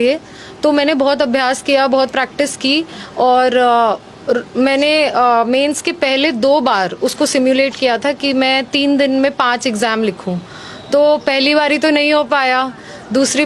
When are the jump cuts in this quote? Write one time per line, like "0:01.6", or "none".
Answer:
none